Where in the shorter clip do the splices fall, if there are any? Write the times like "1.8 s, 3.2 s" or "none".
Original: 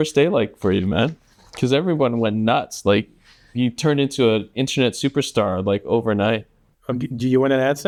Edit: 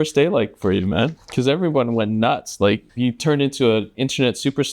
1.2 s, 2.9 s